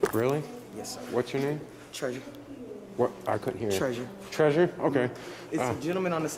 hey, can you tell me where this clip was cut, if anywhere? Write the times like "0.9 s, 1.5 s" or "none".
none